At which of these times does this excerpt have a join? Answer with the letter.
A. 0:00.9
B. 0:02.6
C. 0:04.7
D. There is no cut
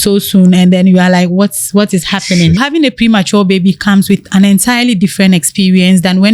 B